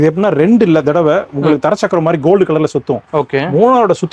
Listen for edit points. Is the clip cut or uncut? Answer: uncut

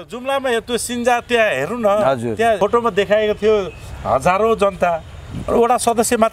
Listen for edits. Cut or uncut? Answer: cut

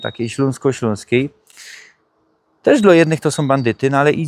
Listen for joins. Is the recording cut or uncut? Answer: uncut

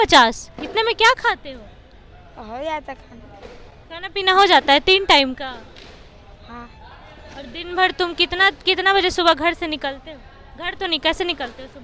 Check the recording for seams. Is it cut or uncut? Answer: uncut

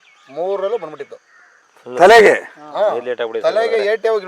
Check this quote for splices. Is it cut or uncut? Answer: uncut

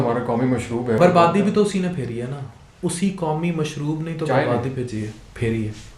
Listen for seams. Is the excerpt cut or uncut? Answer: cut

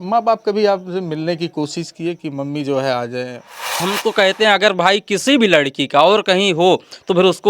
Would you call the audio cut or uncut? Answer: cut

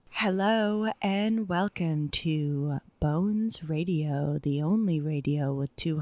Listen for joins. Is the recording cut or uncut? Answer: uncut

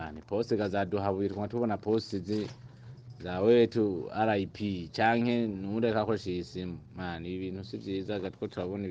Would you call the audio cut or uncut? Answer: uncut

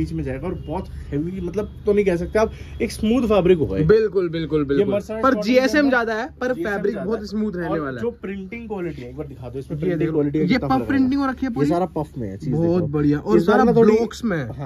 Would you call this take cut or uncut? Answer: uncut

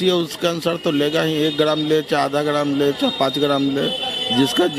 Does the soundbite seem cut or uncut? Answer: uncut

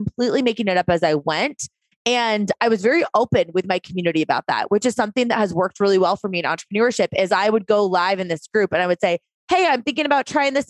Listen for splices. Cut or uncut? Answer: uncut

